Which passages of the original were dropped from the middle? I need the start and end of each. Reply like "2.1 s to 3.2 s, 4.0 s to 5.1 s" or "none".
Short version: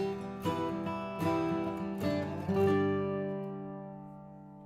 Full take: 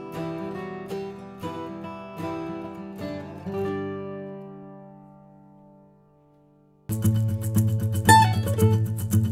none